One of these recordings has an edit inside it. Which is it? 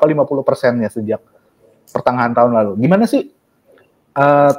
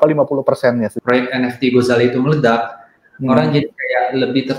second; 1 cut; at 1.0 s

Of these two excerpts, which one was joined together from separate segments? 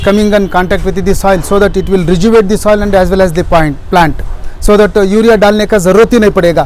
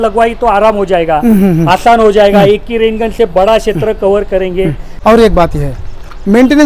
second; 1 cut; at 4.9 s

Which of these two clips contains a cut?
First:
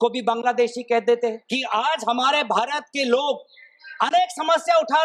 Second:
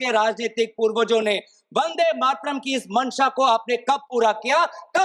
first; 1 cut; at 1.5 s

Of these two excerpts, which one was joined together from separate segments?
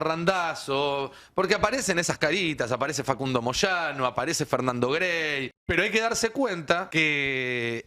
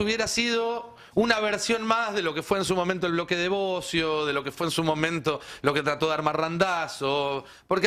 first; 2 cuts; at 5.5 s, 6.9 s

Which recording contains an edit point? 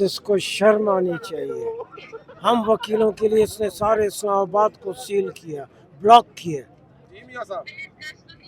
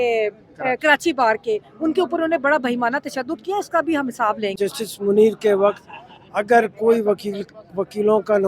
second; 1 cut; at 4.5 s

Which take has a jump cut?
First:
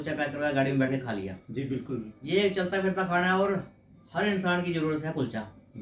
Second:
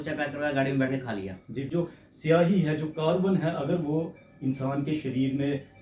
second; 1 cut; at 1.7 s

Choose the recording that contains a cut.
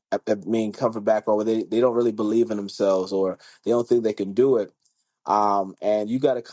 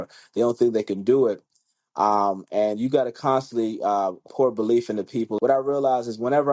second; 2 cuts; at 4.2 s, 5.3 s

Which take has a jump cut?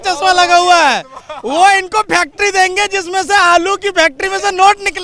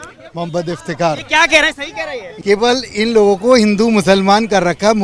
second; 1 cut; at 2.3 s

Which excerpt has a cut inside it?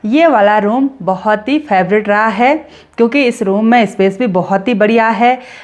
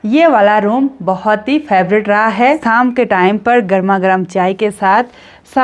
second; 1 cut; at 2.6 s

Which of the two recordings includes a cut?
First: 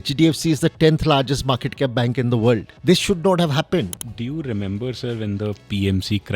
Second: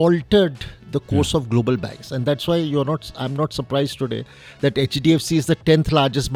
first; 2 cuts; at 2.7 s, 4.0 s

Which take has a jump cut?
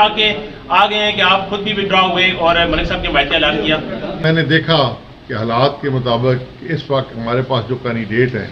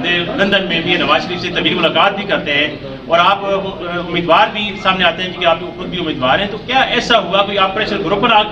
first; 1 cut; at 4.2 s

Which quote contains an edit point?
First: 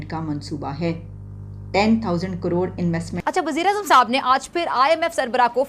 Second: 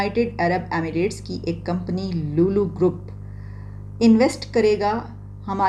first; 1 cut; at 3.1 s

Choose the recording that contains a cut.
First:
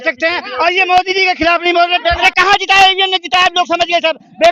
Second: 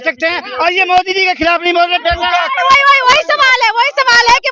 first; 1 cut; at 2.2 s

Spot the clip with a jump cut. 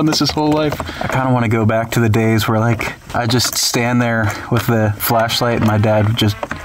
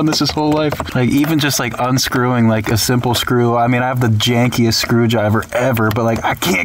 first; 3 cuts; at 0.8 s, 3.0 s, 5.0 s

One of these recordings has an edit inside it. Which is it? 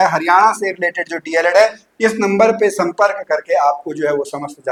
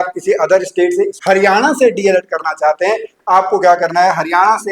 second; 2 cuts; at 1.2 s, 3.1 s

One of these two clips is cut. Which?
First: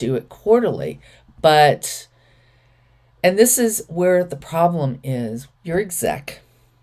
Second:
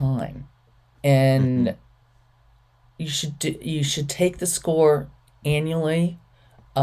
first; 1 cut; at 5.5 s

